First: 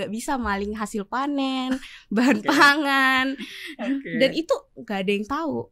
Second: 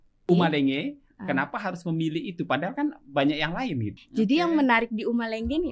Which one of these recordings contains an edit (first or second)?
second